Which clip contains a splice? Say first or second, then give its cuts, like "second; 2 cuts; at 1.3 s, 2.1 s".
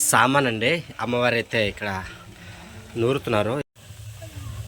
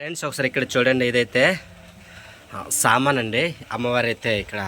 first; 1 cut; at 3.6 s